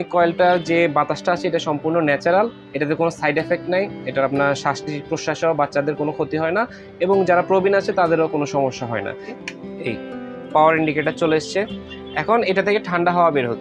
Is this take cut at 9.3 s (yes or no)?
yes